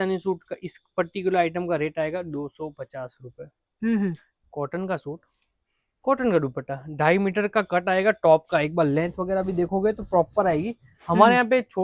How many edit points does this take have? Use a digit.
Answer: 0